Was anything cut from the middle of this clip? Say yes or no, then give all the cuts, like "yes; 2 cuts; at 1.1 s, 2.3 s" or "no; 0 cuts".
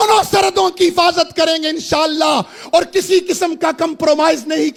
no; 0 cuts